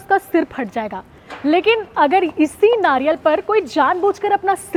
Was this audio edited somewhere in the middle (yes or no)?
no